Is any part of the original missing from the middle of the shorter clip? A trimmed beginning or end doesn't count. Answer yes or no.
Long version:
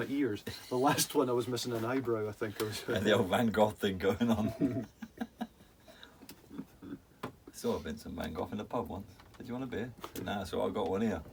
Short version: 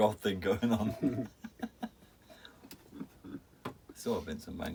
no